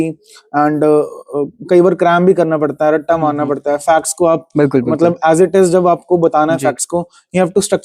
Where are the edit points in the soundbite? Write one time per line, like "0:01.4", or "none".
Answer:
none